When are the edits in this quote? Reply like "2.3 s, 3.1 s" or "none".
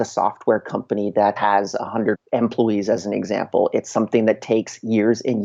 1.4 s